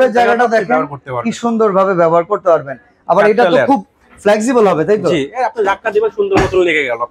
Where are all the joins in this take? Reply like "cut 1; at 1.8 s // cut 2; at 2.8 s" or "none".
none